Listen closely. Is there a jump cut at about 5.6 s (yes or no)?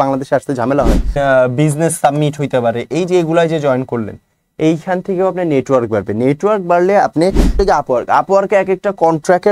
no